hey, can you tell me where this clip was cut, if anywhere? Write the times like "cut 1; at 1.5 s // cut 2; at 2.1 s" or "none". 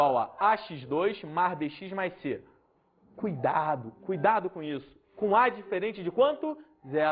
none